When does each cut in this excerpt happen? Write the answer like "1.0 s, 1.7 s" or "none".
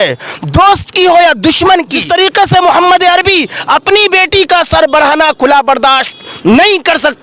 2.0 s

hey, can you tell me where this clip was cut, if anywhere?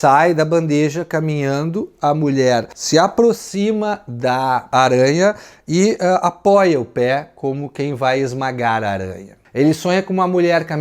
9.3 s

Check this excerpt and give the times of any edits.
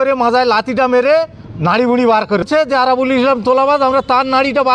2.4 s

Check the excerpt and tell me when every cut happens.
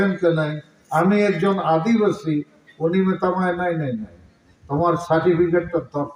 none

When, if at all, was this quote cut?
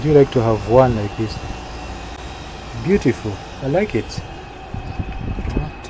none

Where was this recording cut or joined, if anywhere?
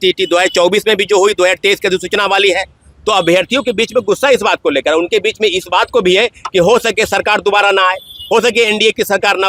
none

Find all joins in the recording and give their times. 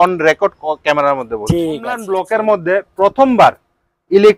2.0 s

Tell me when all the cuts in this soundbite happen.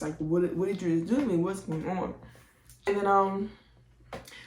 2.9 s

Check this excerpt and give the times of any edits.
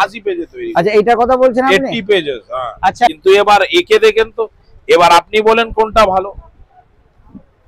3.1 s

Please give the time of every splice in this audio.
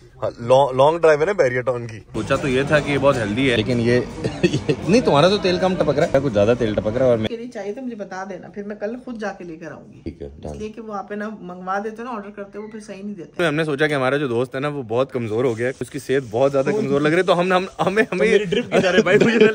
2.1 s, 3.6 s, 6.1 s, 7.3 s, 10.1 s, 13.4 s, 15.9 s

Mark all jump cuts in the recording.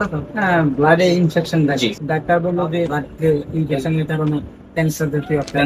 2.0 s, 3.0 s

